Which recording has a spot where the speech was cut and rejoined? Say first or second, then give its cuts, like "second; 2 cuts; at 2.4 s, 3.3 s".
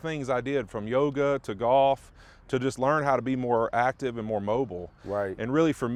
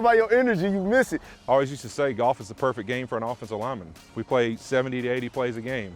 second; 1 cut; at 1.3 s